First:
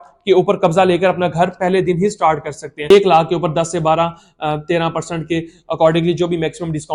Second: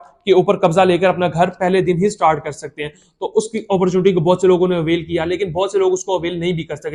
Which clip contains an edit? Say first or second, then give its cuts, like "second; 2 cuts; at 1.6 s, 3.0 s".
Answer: first; 1 cut; at 2.8 s